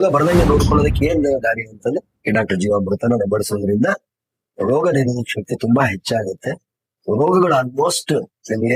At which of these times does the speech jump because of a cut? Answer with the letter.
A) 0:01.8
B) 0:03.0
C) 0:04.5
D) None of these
D